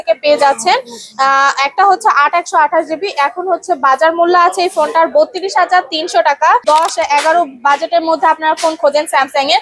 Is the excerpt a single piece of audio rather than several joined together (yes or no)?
no